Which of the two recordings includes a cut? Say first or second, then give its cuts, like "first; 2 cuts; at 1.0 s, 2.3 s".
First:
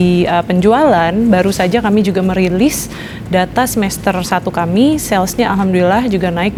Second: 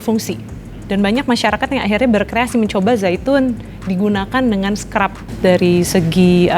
second; 1 cut; at 5.3 s